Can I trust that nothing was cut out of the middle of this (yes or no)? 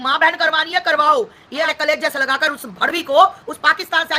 no